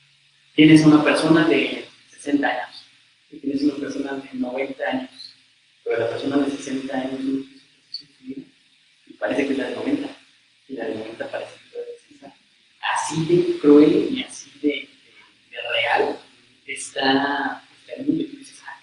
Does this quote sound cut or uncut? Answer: uncut